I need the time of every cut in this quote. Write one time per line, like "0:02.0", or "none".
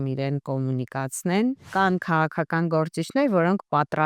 0:01.6